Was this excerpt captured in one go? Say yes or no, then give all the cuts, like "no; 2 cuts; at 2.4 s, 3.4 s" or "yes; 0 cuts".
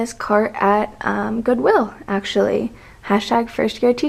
yes; 0 cuts